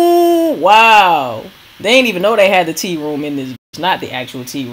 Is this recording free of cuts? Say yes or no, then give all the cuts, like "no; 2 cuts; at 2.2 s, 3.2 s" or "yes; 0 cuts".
yes; 0 cuts